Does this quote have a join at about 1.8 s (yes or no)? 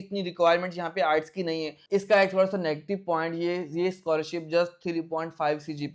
yes